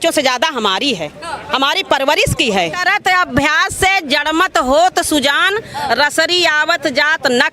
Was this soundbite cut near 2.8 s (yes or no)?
yes